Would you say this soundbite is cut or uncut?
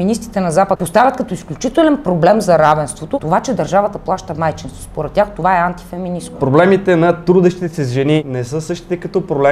cut